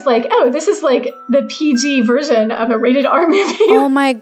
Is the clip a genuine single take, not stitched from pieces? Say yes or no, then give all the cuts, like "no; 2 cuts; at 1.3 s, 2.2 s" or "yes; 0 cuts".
yes; 0 cuts